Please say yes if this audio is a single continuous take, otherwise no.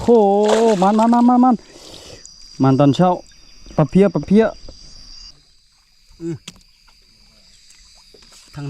no